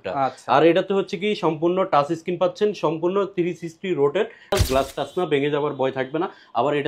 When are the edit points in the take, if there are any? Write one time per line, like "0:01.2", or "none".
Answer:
0:04.5